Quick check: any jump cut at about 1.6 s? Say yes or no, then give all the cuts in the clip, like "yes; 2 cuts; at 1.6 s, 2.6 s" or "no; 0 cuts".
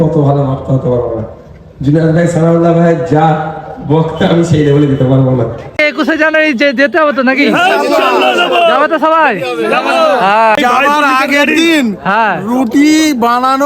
no; 2 cuts; at 5.8 s, 10.6 s